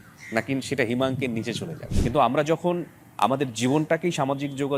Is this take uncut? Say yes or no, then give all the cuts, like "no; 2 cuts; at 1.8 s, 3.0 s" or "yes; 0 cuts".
no; 1 cut; at 1.8 s